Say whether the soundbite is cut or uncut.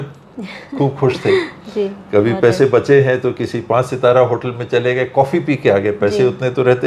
uncut